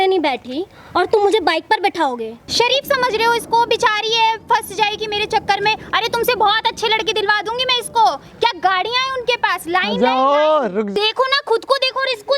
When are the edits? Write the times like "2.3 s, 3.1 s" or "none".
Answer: 2.5 s, 10.9 s